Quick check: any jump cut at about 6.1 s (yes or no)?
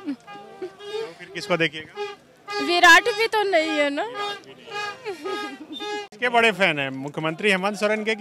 yes